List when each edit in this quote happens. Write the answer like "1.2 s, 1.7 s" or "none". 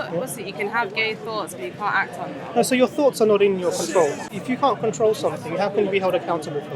4.3 s